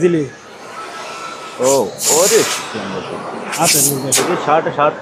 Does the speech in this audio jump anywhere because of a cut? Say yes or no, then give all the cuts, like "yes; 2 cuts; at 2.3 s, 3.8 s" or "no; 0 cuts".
no; 0 cuts